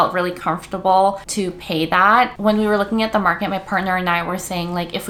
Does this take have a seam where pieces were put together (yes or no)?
no